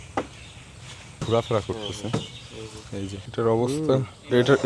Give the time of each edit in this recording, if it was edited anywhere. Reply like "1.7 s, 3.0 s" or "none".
1.2 s, 3.1 s